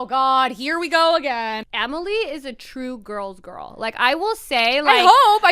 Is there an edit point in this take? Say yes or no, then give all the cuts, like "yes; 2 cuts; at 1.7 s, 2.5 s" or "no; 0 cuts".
yes; 1 cut; at 1.6 s